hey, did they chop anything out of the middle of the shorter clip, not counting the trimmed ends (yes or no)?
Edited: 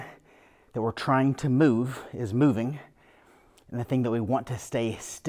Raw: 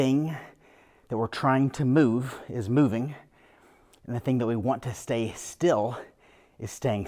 no